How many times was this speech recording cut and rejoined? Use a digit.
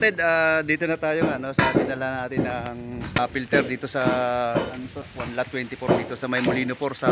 2